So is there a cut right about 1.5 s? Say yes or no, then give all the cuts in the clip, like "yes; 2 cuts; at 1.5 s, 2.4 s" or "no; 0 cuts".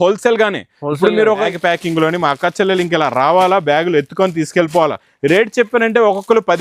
yes; 1 cut; at 1.5 s